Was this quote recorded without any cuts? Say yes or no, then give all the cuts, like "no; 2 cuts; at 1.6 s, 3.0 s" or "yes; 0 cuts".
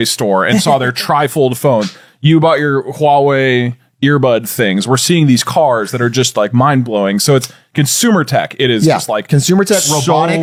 yes; 0 cuts